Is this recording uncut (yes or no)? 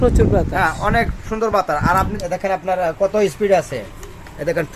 no